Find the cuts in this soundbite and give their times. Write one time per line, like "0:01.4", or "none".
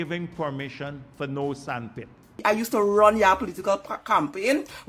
0:02.3